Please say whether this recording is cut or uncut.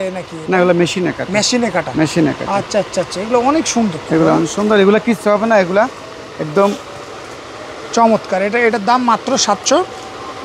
uncut